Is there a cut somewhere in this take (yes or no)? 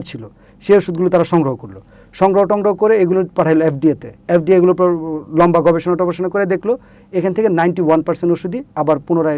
no